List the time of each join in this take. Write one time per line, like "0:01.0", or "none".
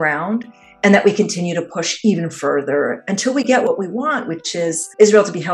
0:03.7